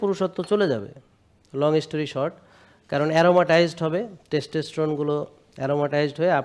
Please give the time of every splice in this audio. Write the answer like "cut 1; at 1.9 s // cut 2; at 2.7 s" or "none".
none